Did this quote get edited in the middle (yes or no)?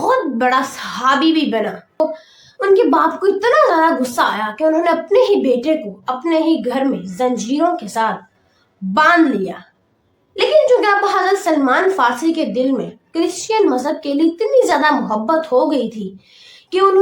yes